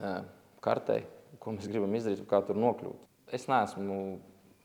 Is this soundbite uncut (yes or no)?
no